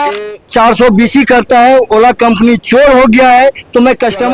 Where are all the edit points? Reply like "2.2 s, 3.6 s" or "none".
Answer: none